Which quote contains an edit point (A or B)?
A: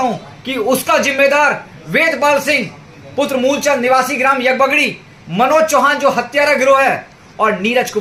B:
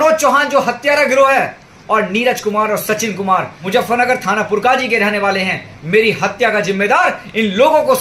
B